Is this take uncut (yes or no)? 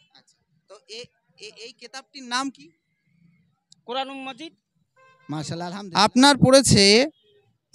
no